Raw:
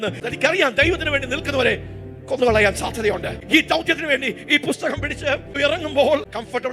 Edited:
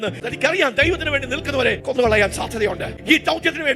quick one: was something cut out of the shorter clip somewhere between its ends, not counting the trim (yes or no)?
yes